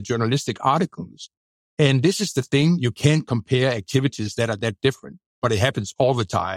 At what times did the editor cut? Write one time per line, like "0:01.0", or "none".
none